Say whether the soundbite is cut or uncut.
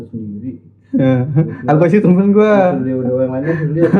uncut